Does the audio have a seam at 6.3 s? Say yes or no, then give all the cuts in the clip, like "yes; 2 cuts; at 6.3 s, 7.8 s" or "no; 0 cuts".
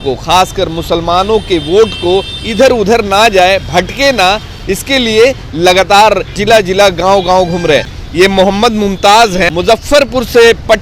yes; 3 cuts; at 6.3 s, 8.0 s, 9.5 s